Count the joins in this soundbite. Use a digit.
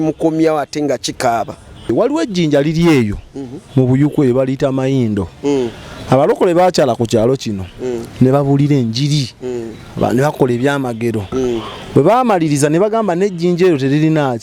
1